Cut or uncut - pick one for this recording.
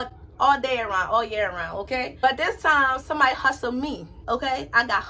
cut